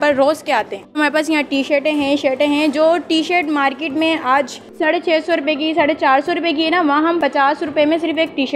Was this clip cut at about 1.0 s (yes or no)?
yes